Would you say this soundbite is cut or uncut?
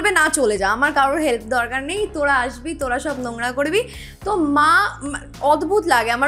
uncut